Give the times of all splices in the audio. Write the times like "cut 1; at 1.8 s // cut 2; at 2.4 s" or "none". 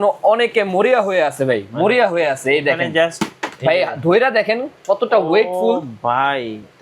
none